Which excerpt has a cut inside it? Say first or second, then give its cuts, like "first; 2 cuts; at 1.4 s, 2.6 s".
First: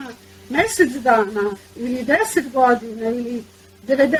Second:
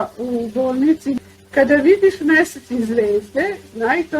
second; 1 cut; at 1.1 s